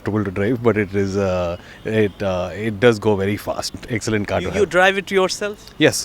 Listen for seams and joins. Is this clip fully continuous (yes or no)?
no